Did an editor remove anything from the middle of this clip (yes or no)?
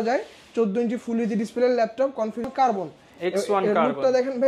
yes